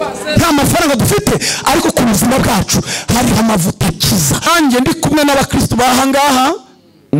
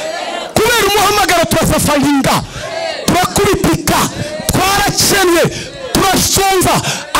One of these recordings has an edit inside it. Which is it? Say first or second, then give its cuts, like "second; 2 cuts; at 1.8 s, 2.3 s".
first; 1 cut; at 4.5 s